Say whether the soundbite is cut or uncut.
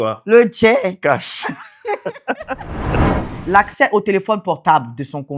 cut